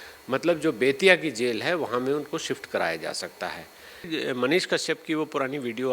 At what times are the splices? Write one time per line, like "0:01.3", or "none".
0:04.0